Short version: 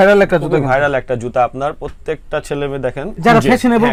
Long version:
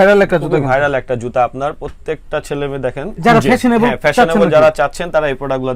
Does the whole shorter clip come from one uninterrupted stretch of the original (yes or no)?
yes